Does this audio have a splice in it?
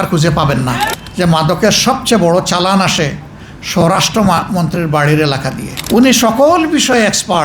yes; 2 cuts; at 0.9 s, 5.7 s

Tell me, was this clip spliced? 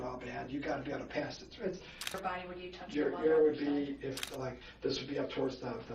yes; 2 cuts; at 2.2 s, 4.2 s

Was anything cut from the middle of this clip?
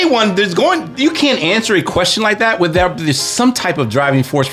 no; 0 cuts

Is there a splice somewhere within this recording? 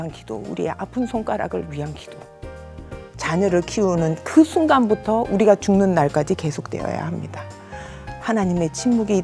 no; 0 cuts

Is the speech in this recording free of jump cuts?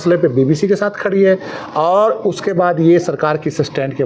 yes; 0 cuts

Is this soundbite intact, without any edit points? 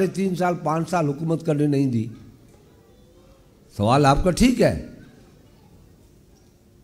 yes; 0 cuts

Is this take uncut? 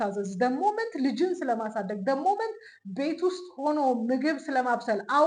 yes; 0 cuts

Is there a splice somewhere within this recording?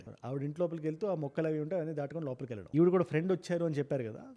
yes; 1 cut; at 2.6 s

